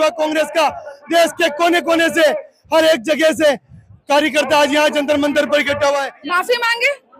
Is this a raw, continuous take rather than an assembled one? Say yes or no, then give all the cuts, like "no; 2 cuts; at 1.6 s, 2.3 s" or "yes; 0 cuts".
no; 1 cut; at 6.1 s